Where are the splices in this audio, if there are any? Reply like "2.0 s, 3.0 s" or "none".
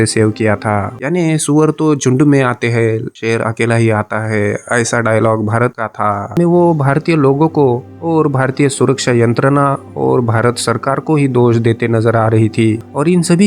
0.9 s, 6.3 s